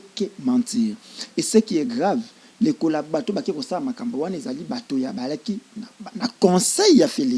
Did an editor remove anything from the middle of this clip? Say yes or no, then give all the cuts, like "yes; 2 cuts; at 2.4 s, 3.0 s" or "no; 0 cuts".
no; 0 cuts